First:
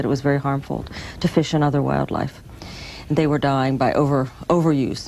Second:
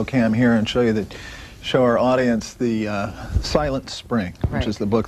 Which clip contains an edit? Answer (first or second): second